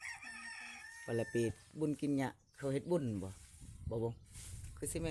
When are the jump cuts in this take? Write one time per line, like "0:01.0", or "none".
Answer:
none